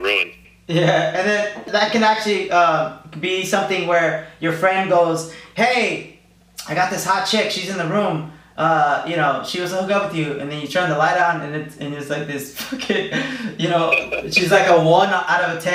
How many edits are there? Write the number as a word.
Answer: one